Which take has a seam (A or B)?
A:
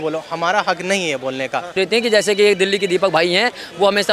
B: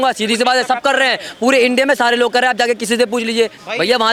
A